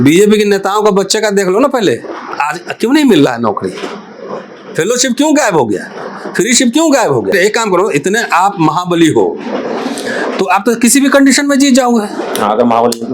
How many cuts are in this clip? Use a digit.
2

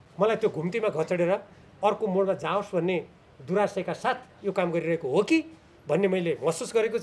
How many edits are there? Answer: 0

